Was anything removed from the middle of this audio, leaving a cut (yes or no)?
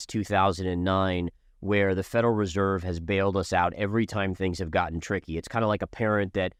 no